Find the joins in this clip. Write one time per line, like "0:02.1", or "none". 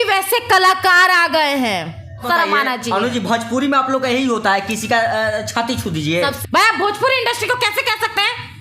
0:02.2
0:06.4